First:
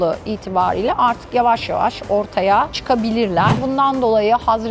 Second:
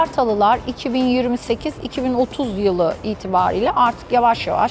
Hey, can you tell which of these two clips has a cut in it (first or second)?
first